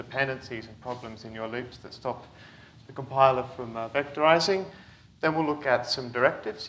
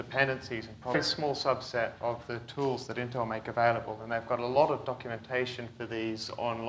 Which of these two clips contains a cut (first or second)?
first